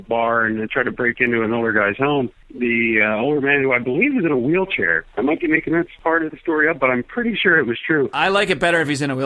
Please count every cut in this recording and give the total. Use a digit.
2